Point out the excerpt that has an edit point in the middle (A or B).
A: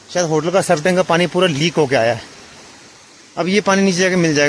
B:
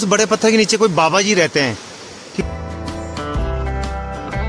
B